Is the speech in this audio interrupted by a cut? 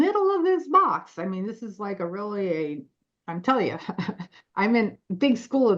no; 0 cuts

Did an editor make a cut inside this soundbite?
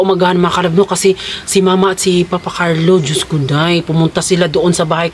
no; 0 cuts

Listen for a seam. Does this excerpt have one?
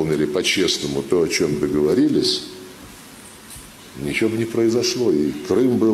no; 0 cuts

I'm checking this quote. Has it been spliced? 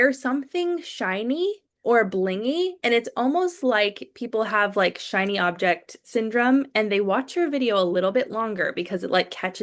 no; 0 cuts

